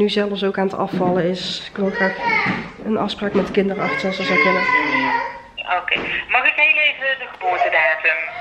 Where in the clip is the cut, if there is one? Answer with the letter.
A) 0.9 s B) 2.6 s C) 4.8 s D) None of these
D